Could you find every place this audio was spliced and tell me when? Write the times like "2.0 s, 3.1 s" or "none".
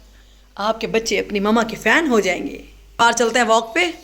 3.0 s